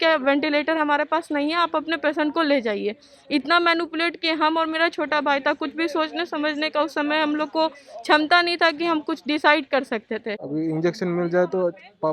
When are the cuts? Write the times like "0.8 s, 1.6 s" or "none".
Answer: 10.4 s